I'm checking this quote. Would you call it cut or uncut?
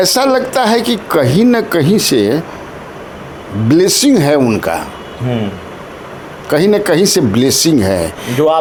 uncut